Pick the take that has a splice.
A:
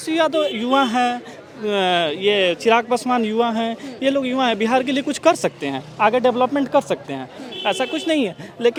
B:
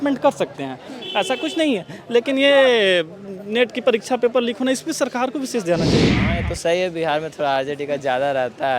B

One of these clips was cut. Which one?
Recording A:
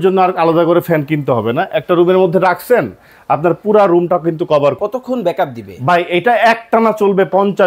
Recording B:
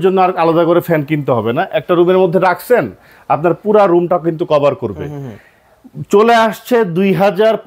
A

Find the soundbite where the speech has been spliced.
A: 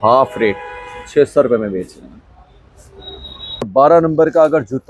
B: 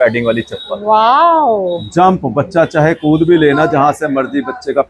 A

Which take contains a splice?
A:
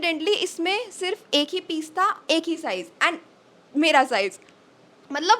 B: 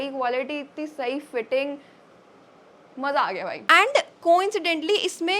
B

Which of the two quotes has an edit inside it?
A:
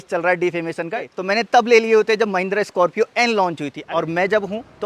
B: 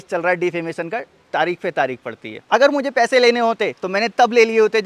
A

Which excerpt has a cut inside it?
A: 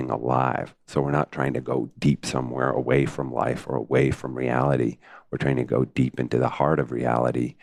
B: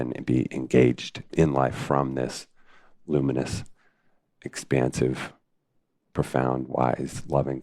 B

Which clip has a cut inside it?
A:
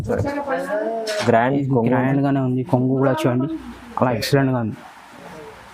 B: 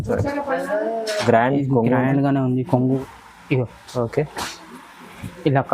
B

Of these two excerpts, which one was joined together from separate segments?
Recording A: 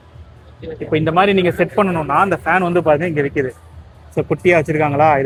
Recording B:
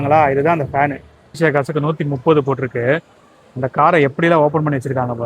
B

